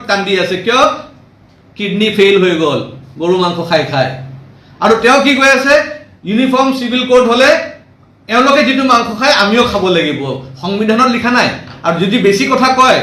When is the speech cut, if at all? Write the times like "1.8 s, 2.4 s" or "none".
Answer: none